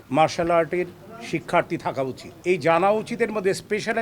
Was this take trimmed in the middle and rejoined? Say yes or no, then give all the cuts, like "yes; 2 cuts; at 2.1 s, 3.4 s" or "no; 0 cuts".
yes; 1 cut; at 2.3 s